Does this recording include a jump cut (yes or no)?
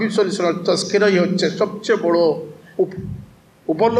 no